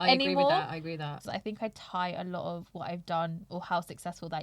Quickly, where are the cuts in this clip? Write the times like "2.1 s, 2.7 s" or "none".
1.1 s